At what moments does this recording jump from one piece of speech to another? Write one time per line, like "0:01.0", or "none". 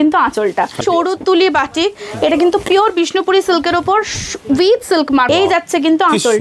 0:00.8
0:05.3